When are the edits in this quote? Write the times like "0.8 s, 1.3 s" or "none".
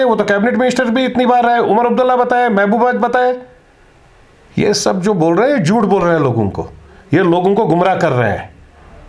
none